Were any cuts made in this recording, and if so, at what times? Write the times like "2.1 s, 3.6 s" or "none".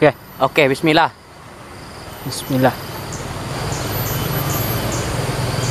3.5 s